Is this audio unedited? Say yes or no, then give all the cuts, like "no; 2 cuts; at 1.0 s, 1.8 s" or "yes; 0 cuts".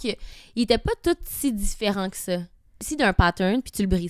no; 1 cut; at 2.8 s